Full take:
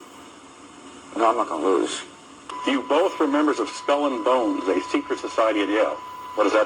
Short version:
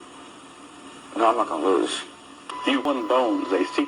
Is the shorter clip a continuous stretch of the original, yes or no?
no